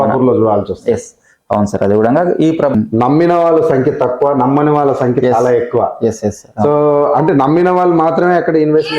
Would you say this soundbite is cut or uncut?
cut